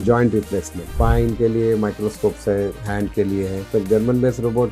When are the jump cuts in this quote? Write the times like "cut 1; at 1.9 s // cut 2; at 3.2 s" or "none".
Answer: cut 1; at 0.9 s // cut 2; at 3.7 s